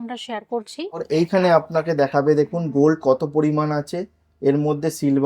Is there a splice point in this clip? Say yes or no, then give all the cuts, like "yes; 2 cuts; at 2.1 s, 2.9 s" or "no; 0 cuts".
yes; 1 cut; at 1.0 s